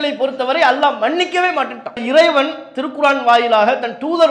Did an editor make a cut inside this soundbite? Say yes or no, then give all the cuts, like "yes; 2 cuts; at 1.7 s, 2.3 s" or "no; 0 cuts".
yes; 1 cut; at 2.0 s